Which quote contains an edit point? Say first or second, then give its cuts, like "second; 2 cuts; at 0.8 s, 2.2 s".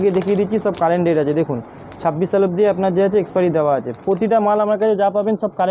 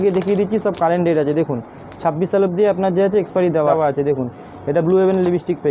second; 1 cut; at 3.7 s